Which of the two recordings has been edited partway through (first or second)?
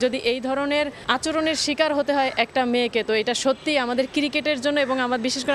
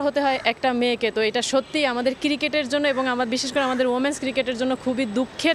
first